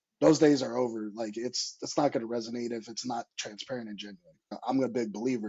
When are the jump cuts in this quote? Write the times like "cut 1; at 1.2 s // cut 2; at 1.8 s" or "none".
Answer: cut 1; at 4.5 s